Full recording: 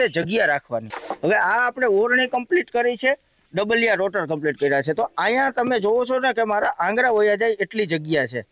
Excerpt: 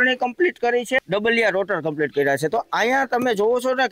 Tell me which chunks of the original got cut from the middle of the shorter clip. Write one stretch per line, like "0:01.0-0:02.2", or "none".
0:03.1-0:03.5

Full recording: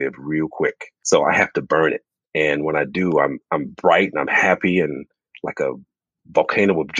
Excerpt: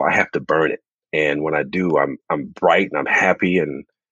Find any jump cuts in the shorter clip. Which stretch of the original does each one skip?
none

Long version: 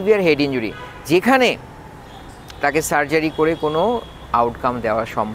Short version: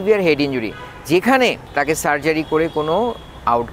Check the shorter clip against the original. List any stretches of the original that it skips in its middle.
0:01.6-0:02.5

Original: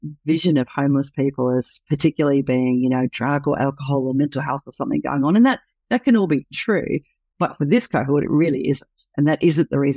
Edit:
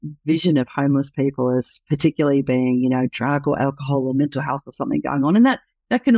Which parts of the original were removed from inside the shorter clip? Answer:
none

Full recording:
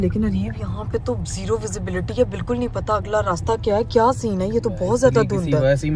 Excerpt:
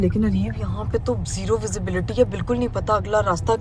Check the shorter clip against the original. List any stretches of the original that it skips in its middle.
none

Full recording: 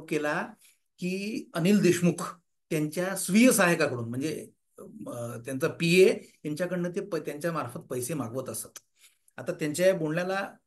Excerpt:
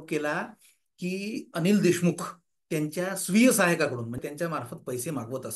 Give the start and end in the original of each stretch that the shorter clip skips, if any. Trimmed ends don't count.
0:04.2-0:07.2

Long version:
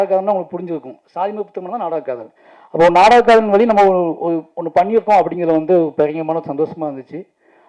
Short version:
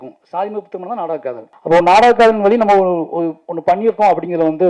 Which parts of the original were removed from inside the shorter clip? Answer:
0:02.3-0:02.6

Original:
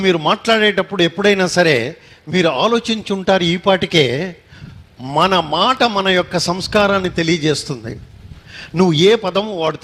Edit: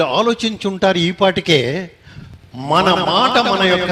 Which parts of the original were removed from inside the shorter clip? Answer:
none

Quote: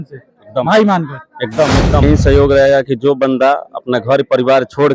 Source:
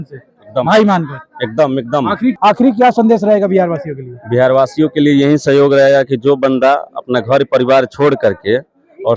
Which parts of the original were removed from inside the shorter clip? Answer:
0:02.0-0:05.3

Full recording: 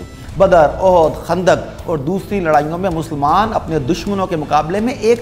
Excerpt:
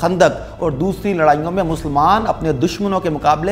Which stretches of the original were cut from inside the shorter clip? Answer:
none

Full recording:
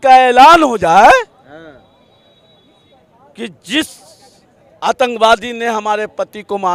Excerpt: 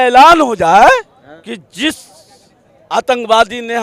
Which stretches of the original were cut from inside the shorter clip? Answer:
0:01.5-0:03.2

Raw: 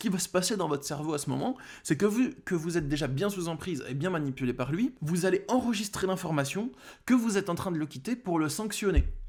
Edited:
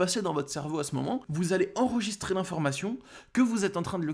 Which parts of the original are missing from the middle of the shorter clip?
0:01.6-0:05.0

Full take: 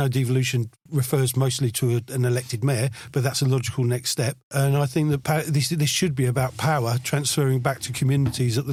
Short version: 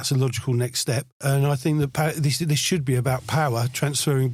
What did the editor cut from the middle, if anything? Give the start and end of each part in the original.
none

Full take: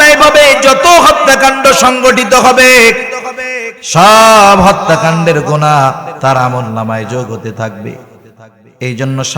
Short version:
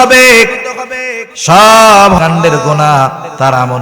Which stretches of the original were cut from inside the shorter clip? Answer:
0:04.7-0:05.0

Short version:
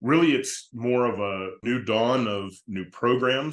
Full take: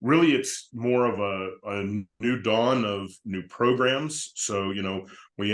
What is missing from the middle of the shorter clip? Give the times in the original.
0:01.5-0:02.1

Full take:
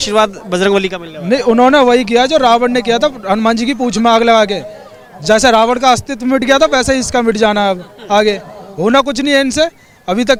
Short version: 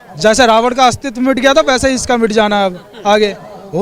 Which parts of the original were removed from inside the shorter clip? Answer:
none

